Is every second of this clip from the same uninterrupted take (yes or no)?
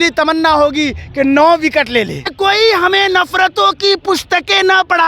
no